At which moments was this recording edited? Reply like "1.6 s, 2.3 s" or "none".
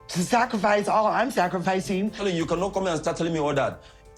2.2 s